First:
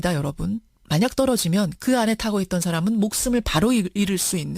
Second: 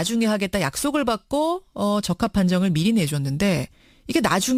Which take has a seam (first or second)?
first